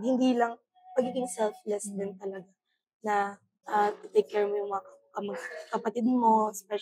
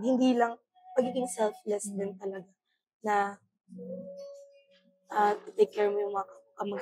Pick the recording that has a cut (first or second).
first